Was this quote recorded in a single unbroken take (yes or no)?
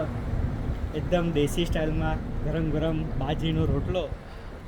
yes